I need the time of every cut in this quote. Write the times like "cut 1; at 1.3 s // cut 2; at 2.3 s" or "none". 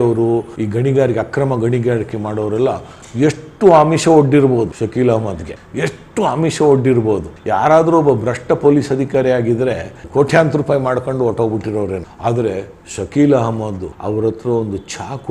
none